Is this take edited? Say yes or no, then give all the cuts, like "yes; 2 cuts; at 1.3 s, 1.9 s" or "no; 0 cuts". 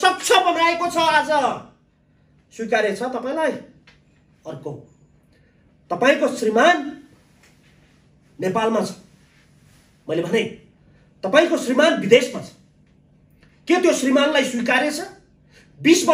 no; 0 cuts